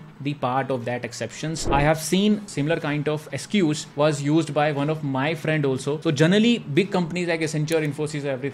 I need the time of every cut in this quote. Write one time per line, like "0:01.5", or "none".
0:01.6